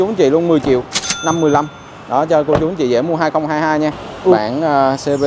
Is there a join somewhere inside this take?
yes; 1 cut; at 4.3 s

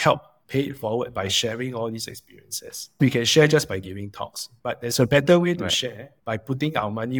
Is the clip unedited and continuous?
no; 1 cut; at 3.0 s

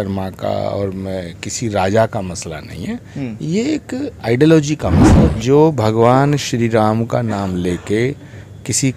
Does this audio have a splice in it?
yes; 1 cut; at 5.3 s

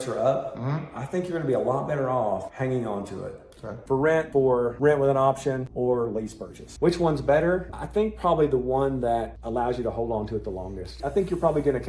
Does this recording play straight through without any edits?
no; 1 cut; at 3.8 s

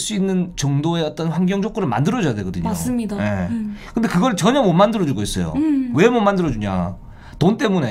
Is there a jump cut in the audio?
no; 0 cuts

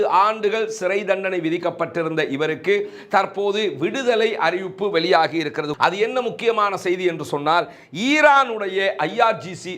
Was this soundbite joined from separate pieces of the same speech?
yes; 1 cut; at 5.7 s

